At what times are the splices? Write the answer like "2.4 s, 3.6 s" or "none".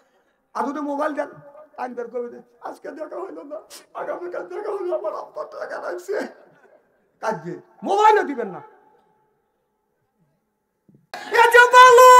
11.2 s